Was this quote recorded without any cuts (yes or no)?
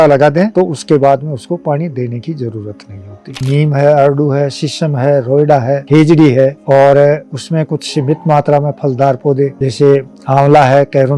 no